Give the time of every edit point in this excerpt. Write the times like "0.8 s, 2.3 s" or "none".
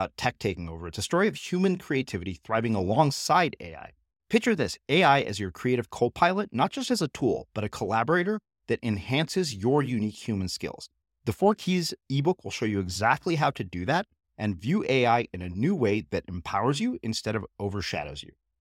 none

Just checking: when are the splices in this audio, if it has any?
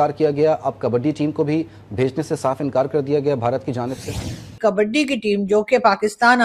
4.6 s

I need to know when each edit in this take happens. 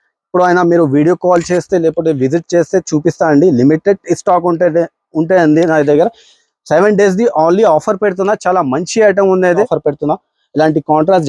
9.6 s

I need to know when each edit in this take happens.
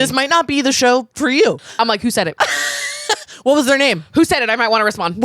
1.6 s

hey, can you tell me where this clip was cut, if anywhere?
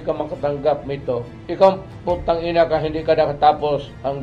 1.4 s

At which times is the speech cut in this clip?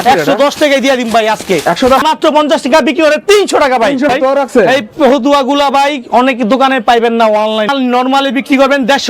2.0 s, 4.1 s, 7.7 s

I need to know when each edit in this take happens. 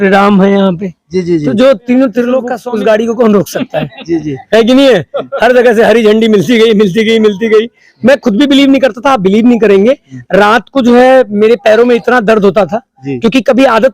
2.6 s

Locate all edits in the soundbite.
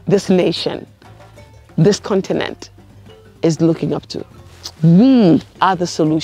none

